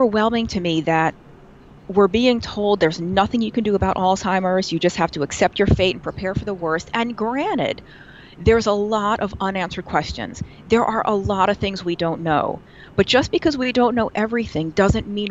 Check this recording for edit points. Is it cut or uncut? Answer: uncut